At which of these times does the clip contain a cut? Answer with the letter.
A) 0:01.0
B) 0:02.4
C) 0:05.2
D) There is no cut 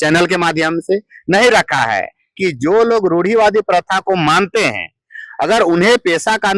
B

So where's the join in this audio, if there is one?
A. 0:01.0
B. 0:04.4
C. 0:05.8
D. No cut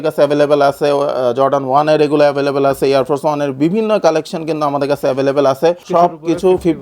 C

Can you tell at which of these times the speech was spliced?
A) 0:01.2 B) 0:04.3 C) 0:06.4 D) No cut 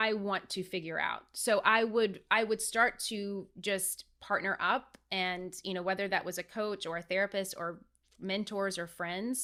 D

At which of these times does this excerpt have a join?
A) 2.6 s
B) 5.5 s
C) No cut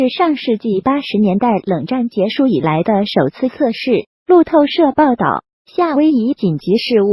A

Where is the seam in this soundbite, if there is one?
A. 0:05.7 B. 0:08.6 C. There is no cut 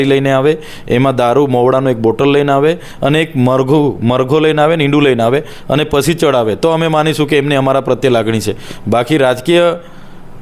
C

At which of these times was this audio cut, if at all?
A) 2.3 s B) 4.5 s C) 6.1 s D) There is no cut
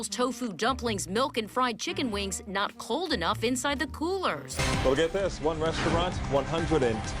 B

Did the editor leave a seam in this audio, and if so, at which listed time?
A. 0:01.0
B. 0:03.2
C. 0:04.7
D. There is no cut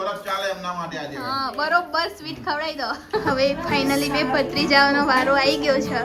B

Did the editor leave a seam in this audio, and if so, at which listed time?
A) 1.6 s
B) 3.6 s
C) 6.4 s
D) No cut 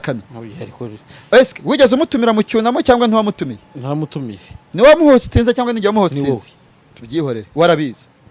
D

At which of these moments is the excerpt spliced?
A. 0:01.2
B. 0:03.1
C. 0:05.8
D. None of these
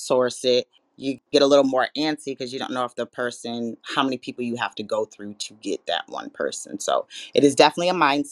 A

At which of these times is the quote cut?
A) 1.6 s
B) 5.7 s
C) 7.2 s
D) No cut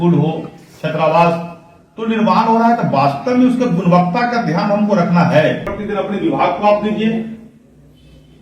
B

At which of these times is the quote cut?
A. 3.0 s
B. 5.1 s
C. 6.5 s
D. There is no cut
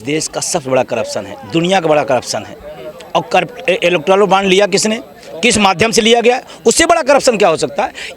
D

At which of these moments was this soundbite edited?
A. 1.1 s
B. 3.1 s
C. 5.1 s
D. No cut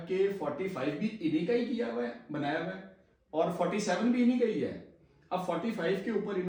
D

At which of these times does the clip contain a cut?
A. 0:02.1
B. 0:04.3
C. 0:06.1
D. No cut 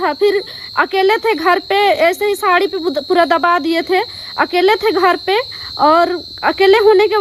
D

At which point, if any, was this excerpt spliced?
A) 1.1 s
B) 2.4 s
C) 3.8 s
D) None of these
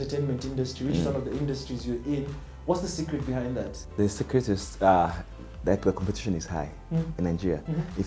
C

